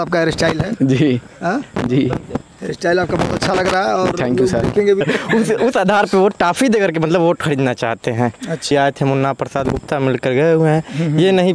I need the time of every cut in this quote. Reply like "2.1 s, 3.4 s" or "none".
5.0 s, 8.7 s

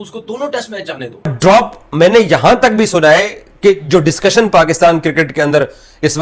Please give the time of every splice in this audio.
1.3 s

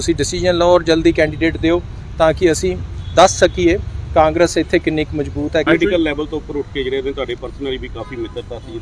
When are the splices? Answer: 5.6 s

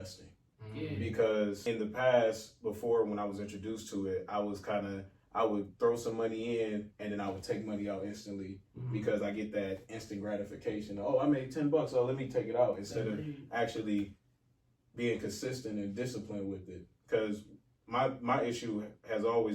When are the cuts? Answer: 1.6 s

